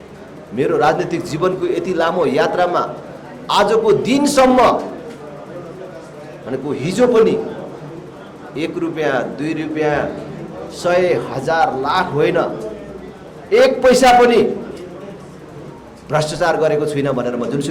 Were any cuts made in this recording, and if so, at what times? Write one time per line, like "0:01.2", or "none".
none

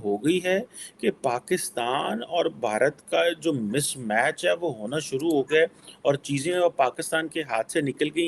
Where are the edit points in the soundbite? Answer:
none

